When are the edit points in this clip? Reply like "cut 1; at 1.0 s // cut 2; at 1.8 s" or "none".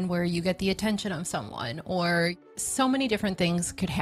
cut 1; at 2.4 s